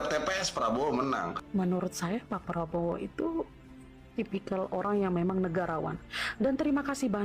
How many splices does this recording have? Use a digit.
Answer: 1